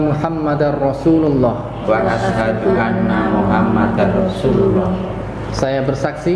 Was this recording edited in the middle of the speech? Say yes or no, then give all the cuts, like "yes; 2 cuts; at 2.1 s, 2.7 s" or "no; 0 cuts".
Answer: no; 0 cuts